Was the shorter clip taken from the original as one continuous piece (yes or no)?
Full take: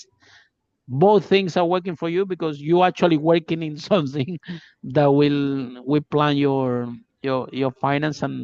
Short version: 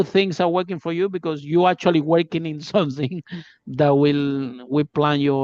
yes